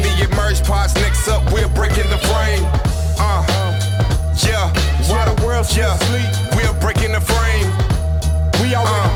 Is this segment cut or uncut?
uncut